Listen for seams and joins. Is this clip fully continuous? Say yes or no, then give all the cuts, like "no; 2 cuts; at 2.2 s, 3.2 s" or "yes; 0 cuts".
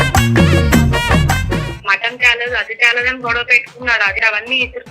no; 2 cuts; at 1.8 s, 4.2 s